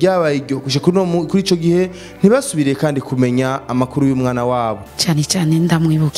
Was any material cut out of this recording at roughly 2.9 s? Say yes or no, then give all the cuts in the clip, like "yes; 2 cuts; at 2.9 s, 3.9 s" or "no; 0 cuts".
no; 1 cut; at 4.8 s